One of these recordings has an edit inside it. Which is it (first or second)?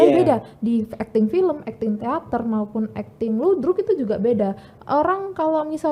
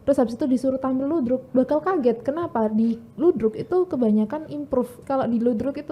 second